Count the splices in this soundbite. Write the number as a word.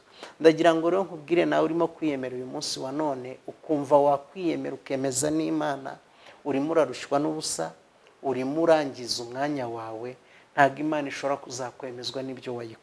zero